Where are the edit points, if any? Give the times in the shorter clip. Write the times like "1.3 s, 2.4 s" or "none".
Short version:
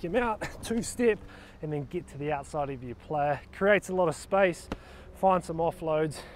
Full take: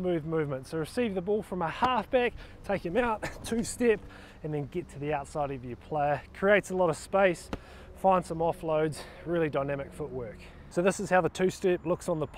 none